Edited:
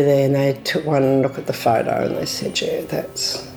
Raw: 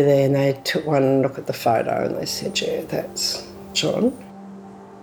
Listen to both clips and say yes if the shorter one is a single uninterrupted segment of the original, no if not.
yes